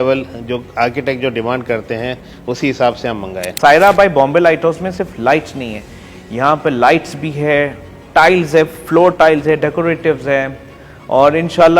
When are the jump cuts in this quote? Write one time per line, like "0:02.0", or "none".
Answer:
0:03.4